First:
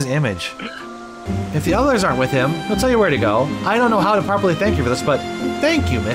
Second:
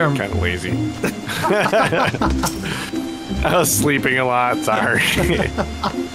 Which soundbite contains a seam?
first; 1 cut; at 1.2 s

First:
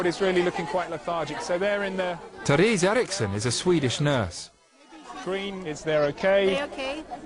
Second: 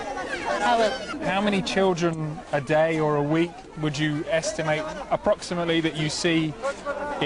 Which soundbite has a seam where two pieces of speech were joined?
second; 1 cut; at 4.8 s

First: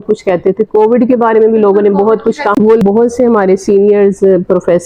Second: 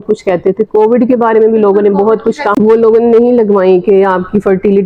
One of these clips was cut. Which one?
first; 1 cut; at 2.8 s

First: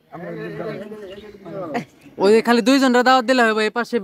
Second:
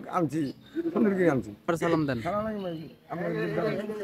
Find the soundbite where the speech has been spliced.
second; 1 cut; at 1.6 s

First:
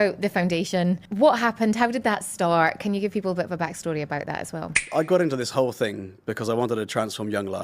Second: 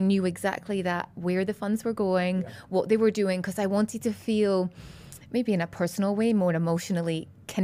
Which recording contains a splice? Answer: first; 2 cuts; at 1.1 s, 4.8 s

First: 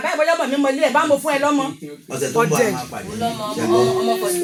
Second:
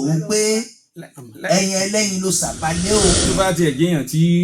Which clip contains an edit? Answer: second; 1 cut; at 3.3 s

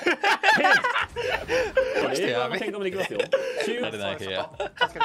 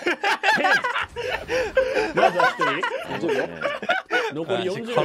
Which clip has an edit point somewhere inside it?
first; 2 cuts; at 2.0 s, 3.8 s

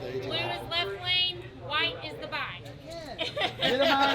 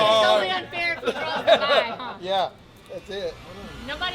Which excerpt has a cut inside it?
first; 1 cut; at 2.7 s

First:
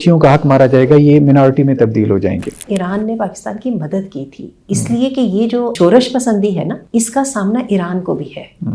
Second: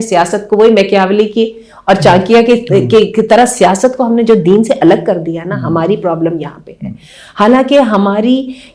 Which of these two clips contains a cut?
first; 3 cuts; at 2.7 s, 5.7 s, 6.8 s

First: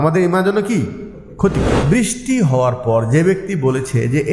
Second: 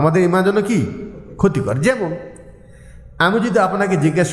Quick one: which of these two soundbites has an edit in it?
first; 1 cut; at 1.7 s

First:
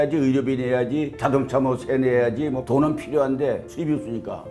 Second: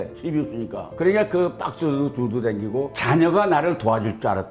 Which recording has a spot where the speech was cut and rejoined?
second; 1 cut; at 2.9 s

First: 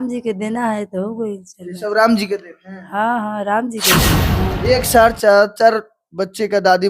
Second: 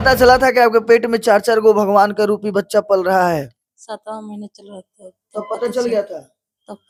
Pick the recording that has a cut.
first; 1 cut; at 4.3 s

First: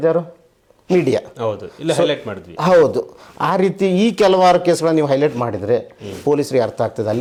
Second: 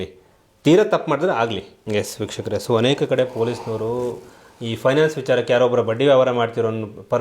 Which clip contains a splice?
second; 1 cut; at 1.7 s

